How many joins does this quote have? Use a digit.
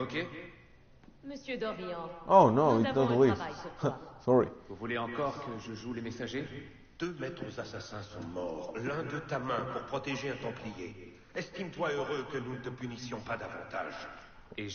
1